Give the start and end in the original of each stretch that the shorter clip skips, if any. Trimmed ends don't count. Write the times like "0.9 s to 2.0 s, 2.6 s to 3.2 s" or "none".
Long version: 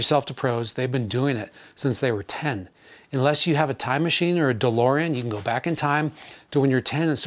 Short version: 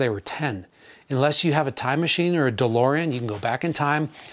none